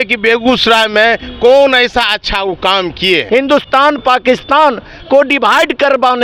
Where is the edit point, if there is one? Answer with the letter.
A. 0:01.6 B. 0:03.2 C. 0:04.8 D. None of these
B